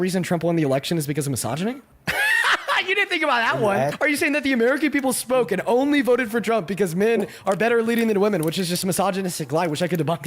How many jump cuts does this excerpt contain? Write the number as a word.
two